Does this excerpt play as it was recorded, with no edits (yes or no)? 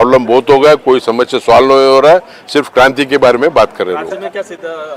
yes